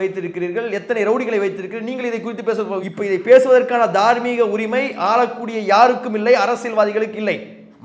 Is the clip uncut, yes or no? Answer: yes